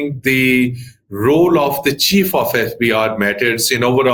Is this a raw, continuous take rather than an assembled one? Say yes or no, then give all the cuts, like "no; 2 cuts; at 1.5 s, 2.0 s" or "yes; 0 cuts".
yes; 0 cuts